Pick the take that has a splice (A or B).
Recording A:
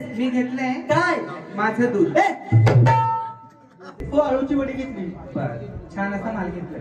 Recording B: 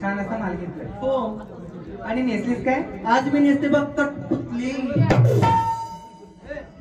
A